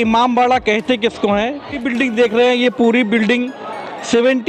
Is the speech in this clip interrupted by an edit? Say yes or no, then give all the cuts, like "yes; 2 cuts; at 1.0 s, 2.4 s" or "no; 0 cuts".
yes; 1 cut; at 1.8 s